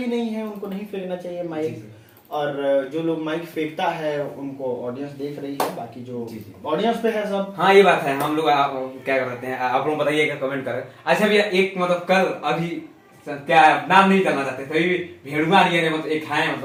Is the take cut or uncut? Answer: uncut